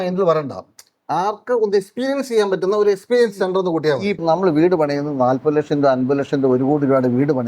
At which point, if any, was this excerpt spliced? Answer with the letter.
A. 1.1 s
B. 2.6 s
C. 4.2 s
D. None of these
C